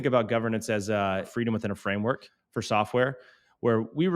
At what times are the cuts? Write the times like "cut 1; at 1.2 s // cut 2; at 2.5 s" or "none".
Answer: cut 1; at 1.3 s // cut 2; at 2.4 s